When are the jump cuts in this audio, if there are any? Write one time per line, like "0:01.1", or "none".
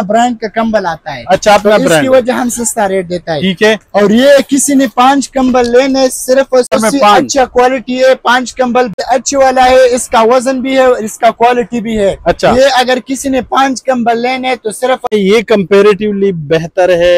0:06.7
0:08.9
0:15.1